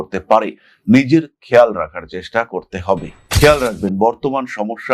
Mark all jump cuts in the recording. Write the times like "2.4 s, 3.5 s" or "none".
3.2 s